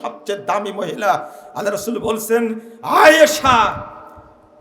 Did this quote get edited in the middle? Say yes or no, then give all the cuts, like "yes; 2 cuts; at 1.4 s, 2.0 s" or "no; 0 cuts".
no; 0 cuts